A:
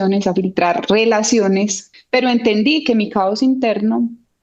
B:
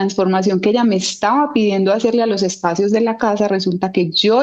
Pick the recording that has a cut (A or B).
A